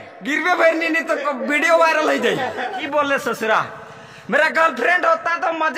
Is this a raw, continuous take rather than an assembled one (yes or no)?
no